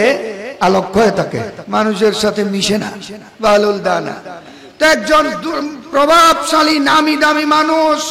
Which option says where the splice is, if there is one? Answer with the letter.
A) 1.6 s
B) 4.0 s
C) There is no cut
A